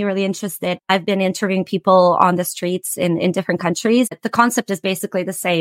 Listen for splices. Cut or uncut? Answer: cut